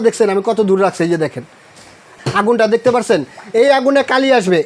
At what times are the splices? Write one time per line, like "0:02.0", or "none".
0:02.0